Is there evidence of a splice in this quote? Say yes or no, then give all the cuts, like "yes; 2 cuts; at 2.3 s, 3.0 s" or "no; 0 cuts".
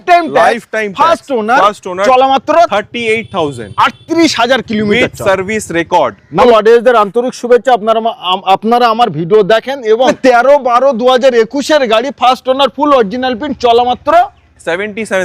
yes; 2 cuts; at 6.4 s, 10.1 s